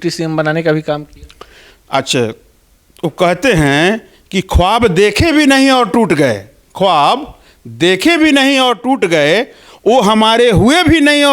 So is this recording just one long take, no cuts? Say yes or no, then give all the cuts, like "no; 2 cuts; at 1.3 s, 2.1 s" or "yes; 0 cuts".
yes; 0 cuts